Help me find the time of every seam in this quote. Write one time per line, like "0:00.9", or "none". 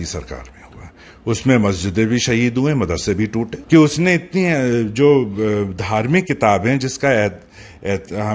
0:03.6